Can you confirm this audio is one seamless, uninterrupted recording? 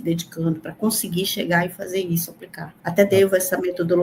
no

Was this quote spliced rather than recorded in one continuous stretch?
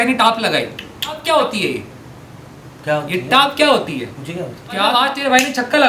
yes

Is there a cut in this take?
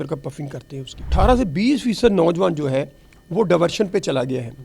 yes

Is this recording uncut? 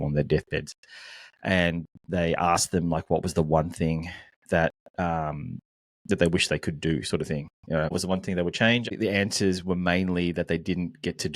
no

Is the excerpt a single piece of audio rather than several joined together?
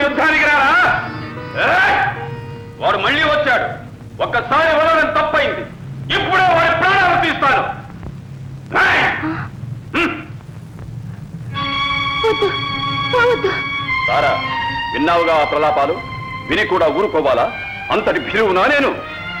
yes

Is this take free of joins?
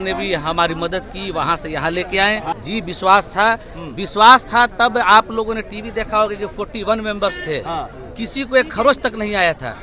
no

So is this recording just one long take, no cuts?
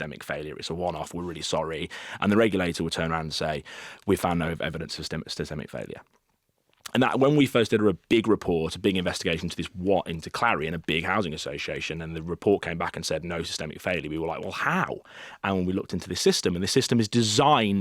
yes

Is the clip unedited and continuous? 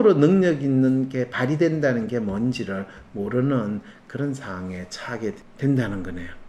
no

